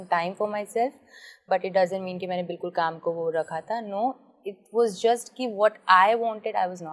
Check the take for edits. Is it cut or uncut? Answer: uncut